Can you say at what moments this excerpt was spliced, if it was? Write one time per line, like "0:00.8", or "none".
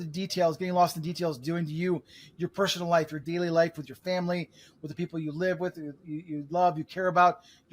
0:03.2